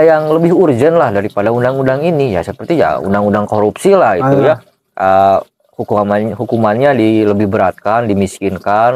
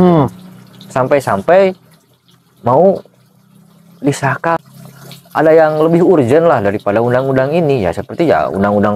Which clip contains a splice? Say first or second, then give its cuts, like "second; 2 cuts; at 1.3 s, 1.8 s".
second; 1 cut; at 4.6 s